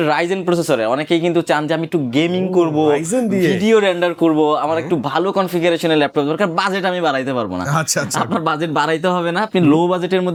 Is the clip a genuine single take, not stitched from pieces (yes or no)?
yes